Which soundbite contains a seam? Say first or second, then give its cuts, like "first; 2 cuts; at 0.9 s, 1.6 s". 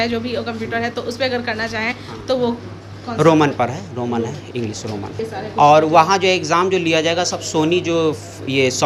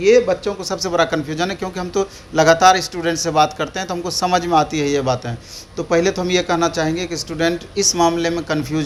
first; 1 cut; at 5.2 s